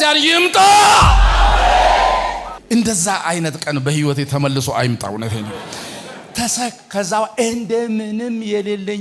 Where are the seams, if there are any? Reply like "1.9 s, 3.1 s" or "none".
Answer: 2.5 s